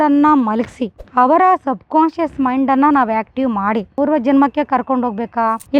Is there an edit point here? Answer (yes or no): yes